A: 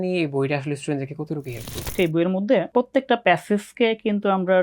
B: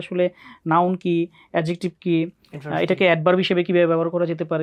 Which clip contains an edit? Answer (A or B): A